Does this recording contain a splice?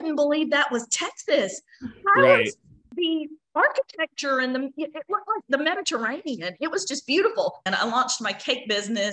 yes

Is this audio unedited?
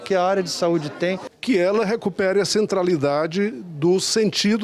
no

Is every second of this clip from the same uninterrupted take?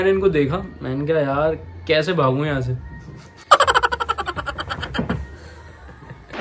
yes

